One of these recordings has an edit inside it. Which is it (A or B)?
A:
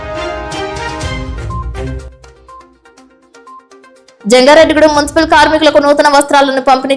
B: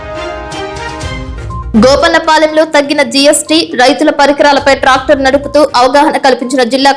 B